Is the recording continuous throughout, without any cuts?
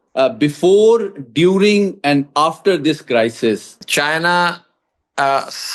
no; 1 cut; at 3.8 s

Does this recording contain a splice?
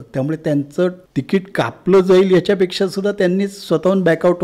yes; 1 cut; at 1.0 s

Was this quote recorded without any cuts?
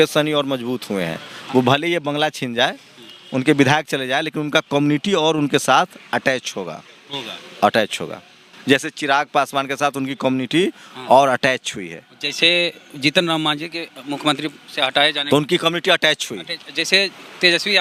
yes; 0 cuts

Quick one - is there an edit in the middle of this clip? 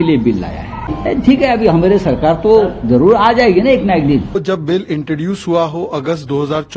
yes; 2 cuts; at 0.9 s, 4.4 s

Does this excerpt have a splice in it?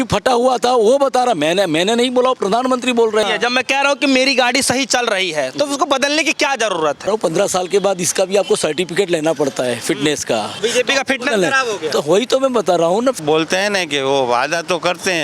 yes; 4 cuts; at 3.2 s, 7.1 s, 10.6 s, 13.2 s

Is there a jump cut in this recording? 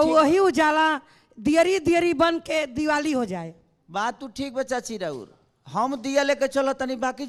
no; 0 cuts

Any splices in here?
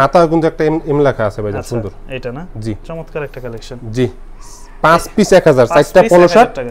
no; 0 cuts

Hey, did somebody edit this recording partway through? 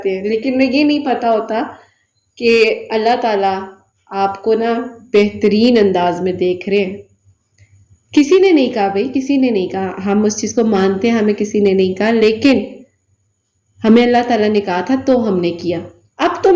no; 0 cuts

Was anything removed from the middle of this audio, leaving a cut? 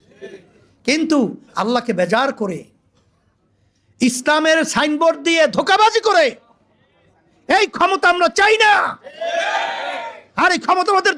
no; 0 cuts

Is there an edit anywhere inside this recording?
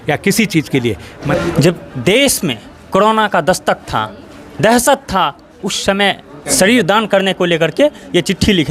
yes; 2 cuts; at 1.1 s, 6.4 s

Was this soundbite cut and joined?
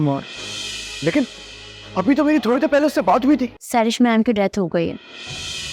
yes; 1 cut; at 3.6 s

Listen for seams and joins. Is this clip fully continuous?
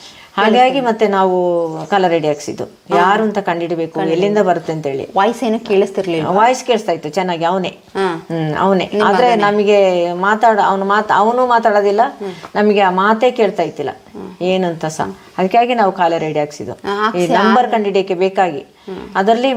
yes; 0 cuts

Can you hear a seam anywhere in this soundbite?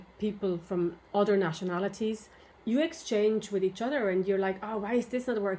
yes; 2 cuts; at 1.0 s, 2.5 s

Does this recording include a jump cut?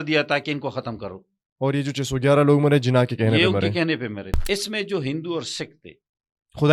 yes; 1 cut; at 4.3 s

